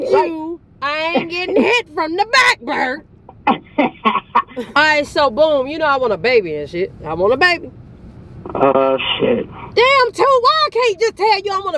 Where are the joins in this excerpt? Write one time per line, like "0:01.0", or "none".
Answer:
0:04.7